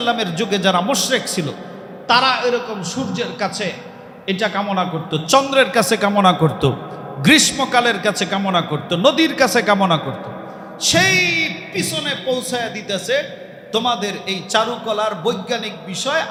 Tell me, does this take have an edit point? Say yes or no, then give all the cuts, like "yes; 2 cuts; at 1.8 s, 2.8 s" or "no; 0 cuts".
no; 0 cuts